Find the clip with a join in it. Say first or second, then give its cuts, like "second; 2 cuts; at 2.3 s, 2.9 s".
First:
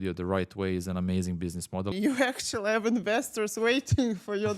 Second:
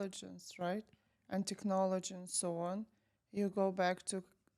first; 1 cut; at 1.9 s